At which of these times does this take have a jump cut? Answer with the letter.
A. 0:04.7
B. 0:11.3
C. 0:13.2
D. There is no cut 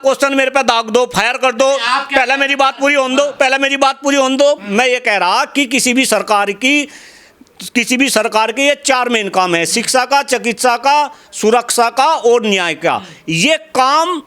D